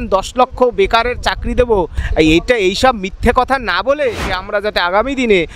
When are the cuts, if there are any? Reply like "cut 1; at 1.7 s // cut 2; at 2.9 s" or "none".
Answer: cut 1; at 2.0 s // cut 2; at 4.3 s